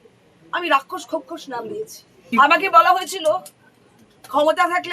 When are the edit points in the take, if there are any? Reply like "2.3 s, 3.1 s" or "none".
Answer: 2.3 s